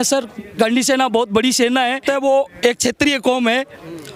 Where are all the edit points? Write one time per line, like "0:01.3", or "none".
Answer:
0:02.0